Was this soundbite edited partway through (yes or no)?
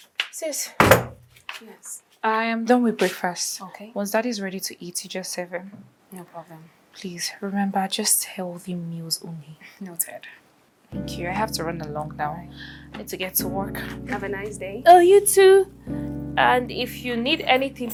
no